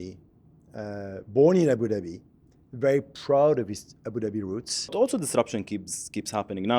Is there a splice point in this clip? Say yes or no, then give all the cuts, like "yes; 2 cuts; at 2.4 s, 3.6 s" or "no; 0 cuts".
yes; 1 cut; at 4.9 s